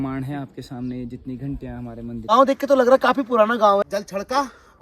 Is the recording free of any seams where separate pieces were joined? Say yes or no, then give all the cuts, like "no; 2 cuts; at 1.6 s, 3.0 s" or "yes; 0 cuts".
no; 2 cuts; at 2.2 s, 3.8 s